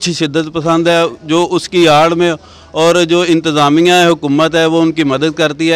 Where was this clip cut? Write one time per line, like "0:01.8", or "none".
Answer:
none